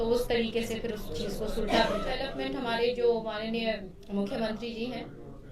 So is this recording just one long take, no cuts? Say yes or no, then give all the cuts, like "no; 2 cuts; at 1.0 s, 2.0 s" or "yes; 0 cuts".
no; 2 cuts; at 2.2 s, 3.9 s